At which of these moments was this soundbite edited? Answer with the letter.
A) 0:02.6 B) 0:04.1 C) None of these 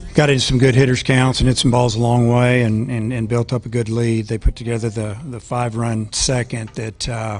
B